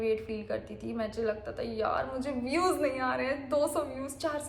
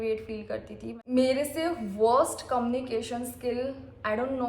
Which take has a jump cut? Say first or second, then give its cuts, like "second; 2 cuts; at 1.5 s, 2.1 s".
second; 1 cut; at 0.9 s